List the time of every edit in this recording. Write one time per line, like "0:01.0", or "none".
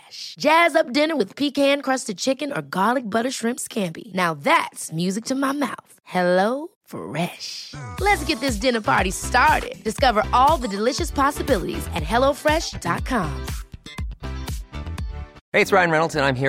0:15.3